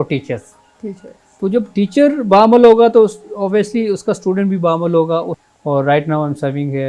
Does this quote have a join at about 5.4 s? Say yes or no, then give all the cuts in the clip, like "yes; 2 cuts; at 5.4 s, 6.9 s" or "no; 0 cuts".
yes; 1 cut; at 5.4 s